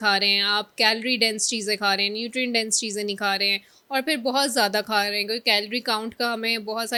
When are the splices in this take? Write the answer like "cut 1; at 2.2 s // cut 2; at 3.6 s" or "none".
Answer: none